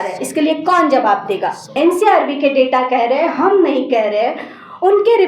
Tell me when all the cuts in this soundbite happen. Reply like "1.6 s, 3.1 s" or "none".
1.7 s